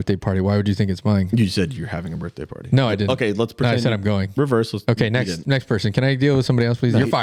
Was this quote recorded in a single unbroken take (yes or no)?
yes